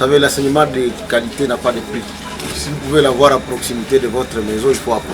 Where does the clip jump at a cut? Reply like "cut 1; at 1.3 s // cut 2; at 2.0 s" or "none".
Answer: cut 1; at 2.6 s